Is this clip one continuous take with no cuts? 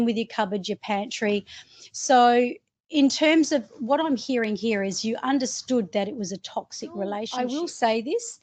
no; 1 cut; at 7.3 s

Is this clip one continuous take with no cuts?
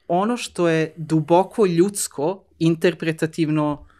yes; 0 cuts

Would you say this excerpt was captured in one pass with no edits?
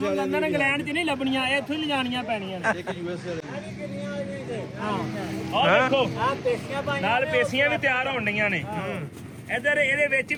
yes; 0 cuts

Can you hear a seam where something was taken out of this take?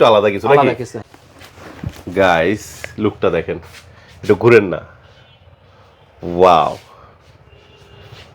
yes; 1 cut; at 1.0 s

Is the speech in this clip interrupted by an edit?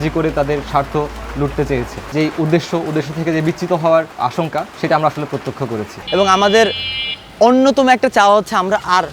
yes; 2 cuts; at 2.1 s, 5.9 s

